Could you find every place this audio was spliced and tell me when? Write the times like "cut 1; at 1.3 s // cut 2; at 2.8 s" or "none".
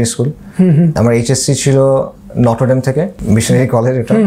cut 1; at 0.9 s // cut 2; at 3.2 s